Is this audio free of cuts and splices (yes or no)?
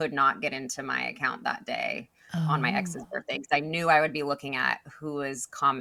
yes